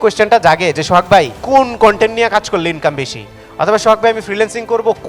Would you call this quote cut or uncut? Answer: cut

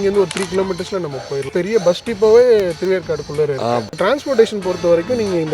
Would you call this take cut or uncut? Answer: cut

